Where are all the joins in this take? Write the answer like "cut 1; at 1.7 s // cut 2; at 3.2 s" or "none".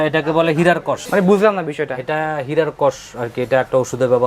none